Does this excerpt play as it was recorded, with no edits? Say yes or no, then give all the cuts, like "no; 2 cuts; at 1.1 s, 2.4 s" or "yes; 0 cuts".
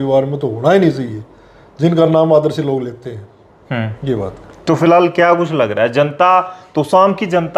yes; 0 cuts